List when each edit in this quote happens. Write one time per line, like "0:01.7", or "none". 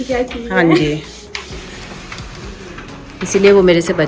none